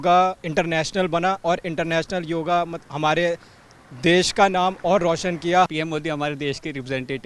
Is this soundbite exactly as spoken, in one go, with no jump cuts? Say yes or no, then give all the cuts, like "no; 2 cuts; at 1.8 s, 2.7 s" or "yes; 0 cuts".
no; 1 cut; at 5.7 s